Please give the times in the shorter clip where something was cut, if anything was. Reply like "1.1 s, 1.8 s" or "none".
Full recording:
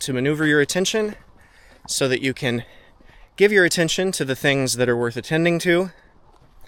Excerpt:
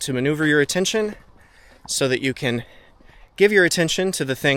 none

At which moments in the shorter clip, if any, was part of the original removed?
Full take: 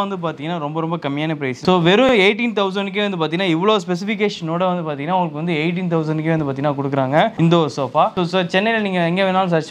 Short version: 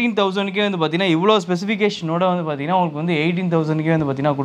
none

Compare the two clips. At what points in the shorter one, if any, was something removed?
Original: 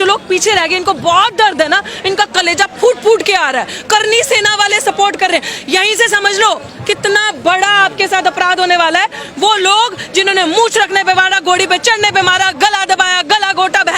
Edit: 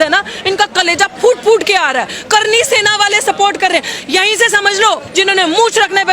5.1 s

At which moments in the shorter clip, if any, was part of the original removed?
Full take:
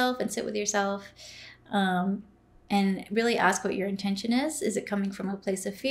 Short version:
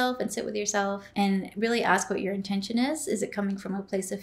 1.0 s

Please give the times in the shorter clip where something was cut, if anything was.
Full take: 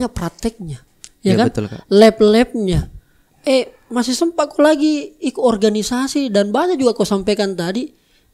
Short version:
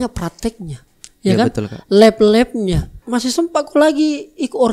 3.0 s

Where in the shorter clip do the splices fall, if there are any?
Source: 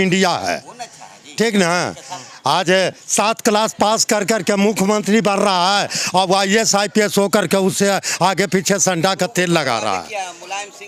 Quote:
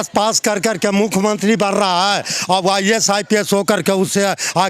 none

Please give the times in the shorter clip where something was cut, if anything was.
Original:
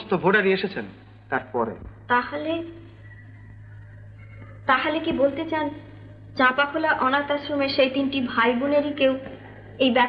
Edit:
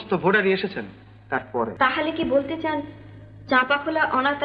1.7 s

